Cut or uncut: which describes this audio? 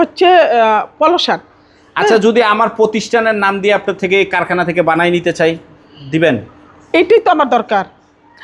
uncut